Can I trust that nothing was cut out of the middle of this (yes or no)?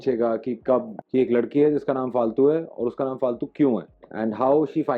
no